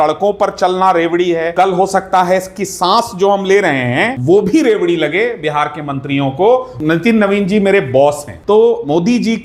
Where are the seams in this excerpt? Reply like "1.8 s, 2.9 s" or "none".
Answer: 1.5 s, 4.1 s, 6.7 s, 8.3 s